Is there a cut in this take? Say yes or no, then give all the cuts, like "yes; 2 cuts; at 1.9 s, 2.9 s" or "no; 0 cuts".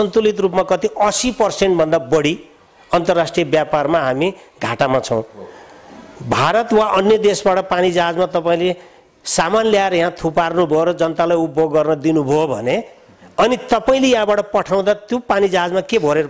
no; 0 cuts